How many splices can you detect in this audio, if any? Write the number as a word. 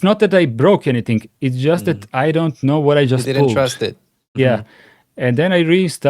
zero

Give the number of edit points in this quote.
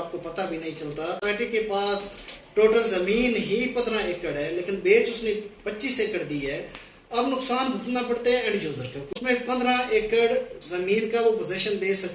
two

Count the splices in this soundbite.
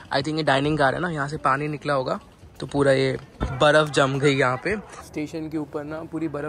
two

